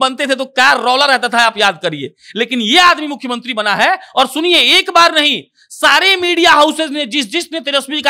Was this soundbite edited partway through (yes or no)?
no